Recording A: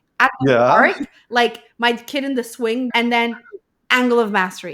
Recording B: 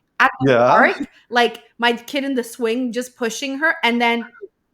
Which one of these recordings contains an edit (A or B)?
A